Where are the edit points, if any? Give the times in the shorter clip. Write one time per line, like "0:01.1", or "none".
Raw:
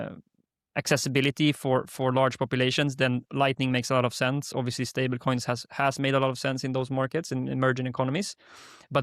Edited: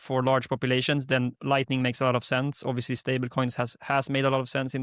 none